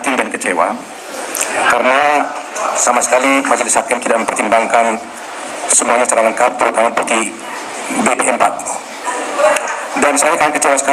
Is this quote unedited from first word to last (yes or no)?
yes